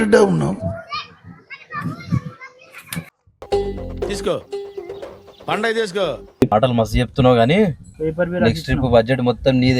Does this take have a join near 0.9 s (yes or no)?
no